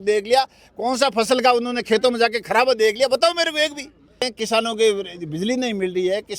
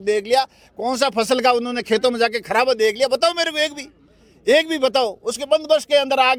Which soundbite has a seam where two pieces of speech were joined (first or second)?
first